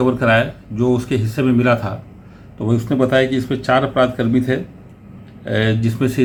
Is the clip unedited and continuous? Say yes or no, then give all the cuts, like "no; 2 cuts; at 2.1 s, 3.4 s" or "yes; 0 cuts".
yes; 0 cuts